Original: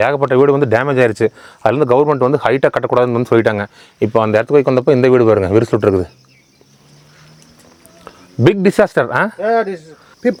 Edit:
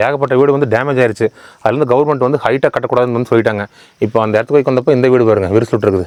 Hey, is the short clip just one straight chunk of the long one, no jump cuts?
yes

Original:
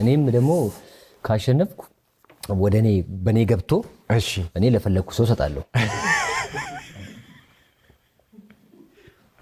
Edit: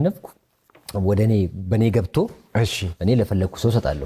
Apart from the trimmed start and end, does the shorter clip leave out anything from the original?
no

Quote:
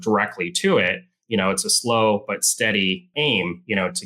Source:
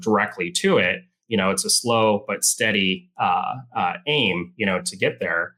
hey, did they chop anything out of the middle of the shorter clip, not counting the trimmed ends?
yes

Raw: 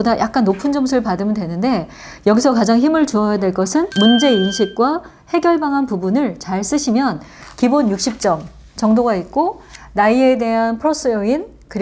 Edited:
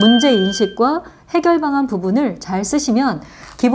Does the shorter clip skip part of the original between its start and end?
no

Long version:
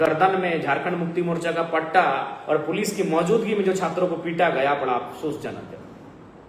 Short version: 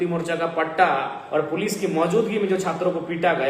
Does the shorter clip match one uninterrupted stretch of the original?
yes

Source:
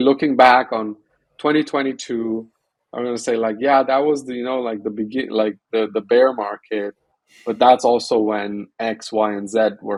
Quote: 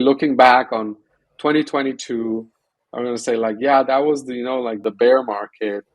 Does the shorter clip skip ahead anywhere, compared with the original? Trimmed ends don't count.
yes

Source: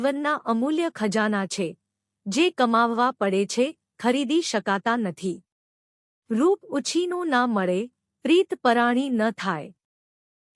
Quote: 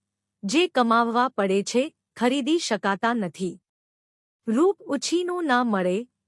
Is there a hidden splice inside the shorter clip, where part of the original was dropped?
no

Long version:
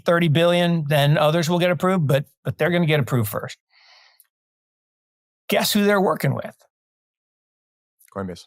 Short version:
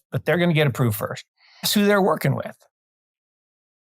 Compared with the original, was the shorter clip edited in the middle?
yes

